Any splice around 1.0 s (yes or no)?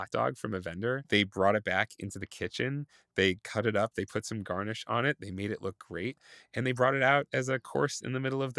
yes